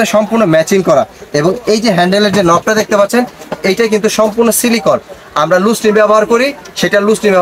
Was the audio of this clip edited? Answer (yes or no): no